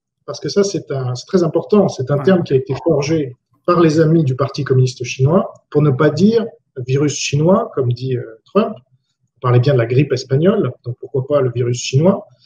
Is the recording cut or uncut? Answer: uncut